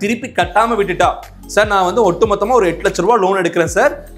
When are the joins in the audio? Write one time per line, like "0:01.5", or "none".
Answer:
none